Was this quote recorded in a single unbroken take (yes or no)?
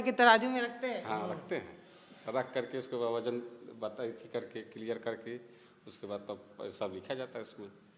yes